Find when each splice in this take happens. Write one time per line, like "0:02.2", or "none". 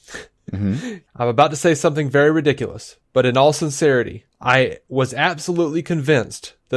0:01.0